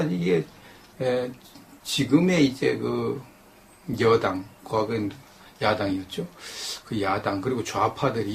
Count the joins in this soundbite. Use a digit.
0